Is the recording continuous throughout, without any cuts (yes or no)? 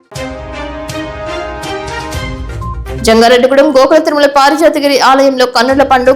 no